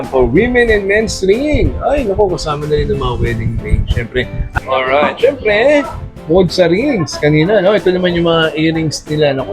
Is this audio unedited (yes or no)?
no